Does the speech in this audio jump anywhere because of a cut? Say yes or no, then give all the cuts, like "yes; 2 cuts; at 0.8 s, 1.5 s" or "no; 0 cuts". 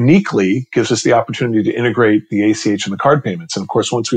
no; 0 cuts